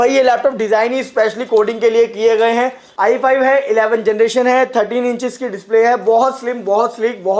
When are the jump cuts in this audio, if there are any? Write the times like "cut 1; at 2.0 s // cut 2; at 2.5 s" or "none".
cut 1; at 2.8 s